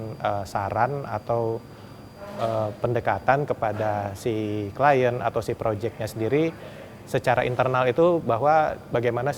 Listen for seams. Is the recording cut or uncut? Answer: uncut